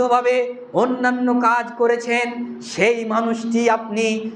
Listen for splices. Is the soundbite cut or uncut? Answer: uncut